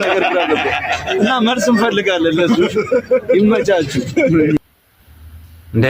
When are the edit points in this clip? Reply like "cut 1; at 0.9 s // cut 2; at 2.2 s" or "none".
none